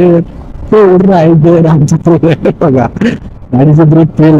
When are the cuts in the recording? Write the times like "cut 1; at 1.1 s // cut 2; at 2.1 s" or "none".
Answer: none